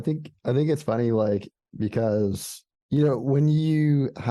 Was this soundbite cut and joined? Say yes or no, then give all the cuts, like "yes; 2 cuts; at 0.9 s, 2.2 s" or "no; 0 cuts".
no; 0 cuts